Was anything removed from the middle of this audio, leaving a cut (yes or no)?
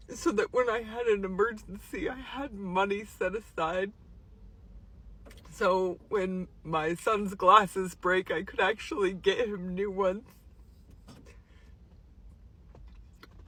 no